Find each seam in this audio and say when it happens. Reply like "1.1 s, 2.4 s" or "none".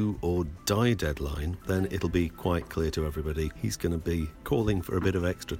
1.5 s, 3.6 s, 4.4 s